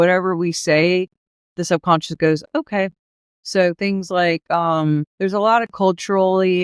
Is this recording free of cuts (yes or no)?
no